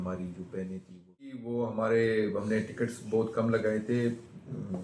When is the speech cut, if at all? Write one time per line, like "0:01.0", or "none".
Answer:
0:01.4